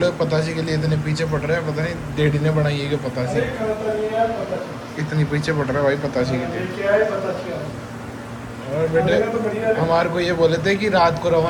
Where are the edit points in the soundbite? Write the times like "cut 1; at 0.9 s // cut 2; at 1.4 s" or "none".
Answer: none